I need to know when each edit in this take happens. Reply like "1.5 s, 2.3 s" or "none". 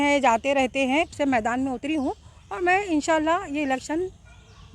1.2 s

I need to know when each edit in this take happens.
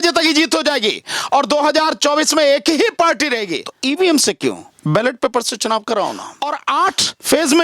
3.6 s, 6.3 s

